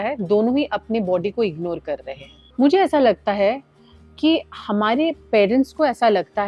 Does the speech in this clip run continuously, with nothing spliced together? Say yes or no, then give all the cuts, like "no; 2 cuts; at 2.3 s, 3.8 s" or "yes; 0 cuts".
yes; 0 cuts